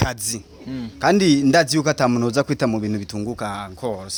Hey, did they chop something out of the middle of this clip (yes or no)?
no